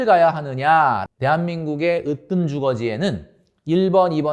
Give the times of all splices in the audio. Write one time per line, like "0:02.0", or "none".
0:01.0

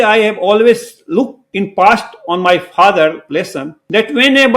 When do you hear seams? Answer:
0:01.4

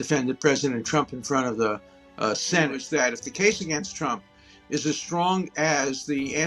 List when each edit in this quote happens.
0:02.8

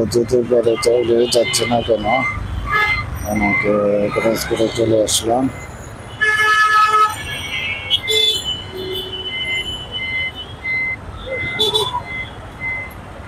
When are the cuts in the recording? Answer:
none

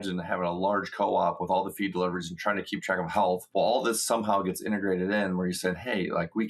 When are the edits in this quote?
0:03.4

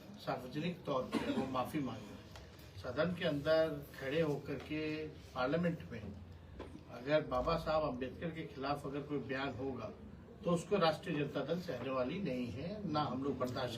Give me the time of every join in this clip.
none

